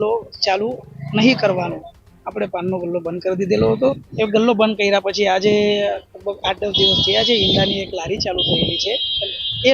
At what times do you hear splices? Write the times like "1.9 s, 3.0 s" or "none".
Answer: 4.0 s